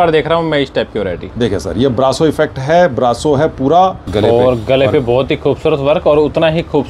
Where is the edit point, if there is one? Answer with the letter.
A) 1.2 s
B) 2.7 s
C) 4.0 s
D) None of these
C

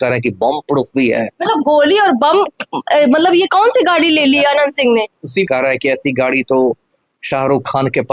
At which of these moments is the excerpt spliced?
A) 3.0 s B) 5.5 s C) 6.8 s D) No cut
B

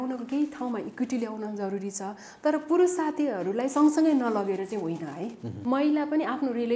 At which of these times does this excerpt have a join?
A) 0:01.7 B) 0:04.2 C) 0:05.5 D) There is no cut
C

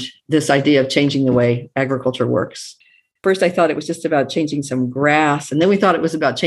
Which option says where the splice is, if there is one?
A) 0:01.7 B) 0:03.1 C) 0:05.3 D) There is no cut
B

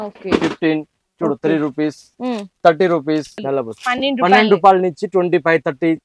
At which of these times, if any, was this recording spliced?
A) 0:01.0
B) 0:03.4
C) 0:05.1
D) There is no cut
B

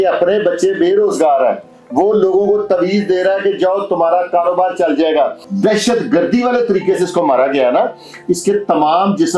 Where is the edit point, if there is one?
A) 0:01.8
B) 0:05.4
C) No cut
B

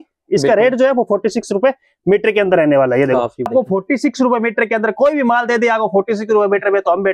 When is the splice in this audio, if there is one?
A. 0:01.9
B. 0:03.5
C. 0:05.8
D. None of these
B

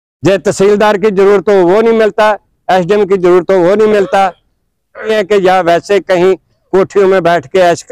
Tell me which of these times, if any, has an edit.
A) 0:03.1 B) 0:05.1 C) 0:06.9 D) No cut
B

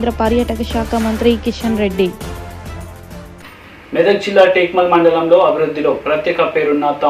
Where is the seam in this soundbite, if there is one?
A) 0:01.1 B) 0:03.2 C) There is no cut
B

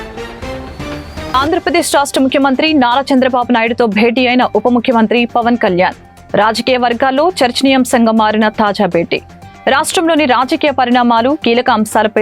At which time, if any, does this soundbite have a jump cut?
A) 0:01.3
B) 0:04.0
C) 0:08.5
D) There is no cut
A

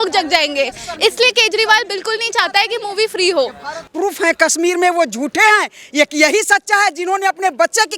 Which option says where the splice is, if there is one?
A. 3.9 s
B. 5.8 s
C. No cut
A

